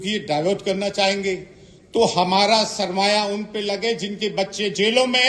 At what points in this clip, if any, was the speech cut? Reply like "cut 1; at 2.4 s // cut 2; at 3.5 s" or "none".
none